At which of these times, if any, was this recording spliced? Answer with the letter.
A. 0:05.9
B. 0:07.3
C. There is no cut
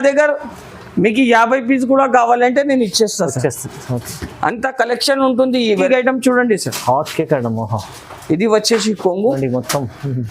A